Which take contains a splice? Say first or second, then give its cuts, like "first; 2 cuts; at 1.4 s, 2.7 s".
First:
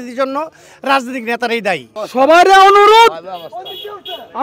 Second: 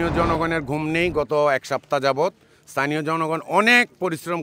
first; 1 cut; at 2.0 s